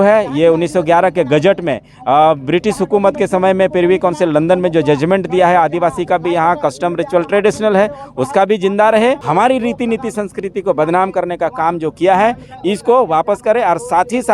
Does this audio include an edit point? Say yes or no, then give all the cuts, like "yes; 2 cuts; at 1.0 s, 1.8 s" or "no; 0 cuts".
yes; 1 cut; at 9.2 s